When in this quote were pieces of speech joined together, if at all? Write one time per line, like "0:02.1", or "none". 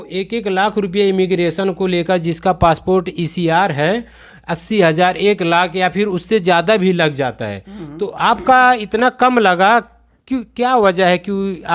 none